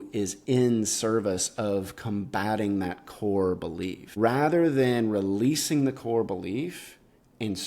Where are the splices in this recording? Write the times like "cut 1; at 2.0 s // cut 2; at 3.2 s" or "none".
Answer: cut 1; at 4.1 s